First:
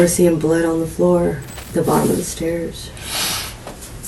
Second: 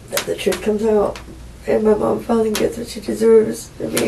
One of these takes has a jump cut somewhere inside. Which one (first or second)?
first